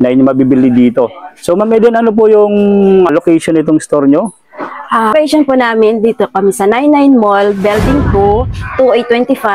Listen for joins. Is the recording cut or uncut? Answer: cut